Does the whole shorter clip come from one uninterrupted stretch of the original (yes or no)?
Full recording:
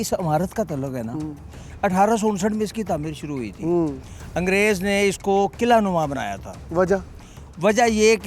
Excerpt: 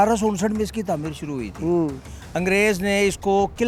yes